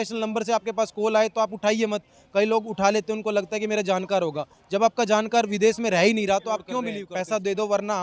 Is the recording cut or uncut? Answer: cut